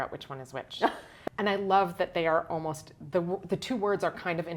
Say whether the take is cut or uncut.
cut